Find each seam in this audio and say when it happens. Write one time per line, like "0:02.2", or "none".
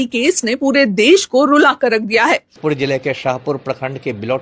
0:02.6